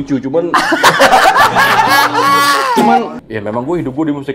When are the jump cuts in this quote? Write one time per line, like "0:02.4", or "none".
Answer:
0:03.2